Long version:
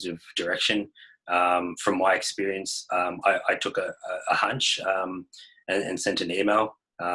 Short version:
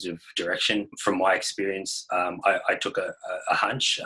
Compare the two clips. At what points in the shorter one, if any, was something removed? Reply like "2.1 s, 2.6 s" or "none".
1.0 s